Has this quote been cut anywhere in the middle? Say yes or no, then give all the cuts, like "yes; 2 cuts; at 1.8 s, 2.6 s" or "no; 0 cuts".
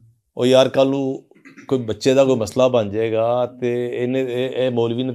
no; 0 cuts